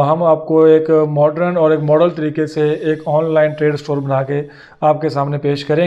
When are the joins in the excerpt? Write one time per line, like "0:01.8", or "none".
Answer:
none